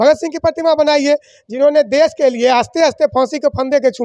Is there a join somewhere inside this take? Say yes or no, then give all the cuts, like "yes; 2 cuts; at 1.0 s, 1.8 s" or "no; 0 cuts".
no; 0 cuts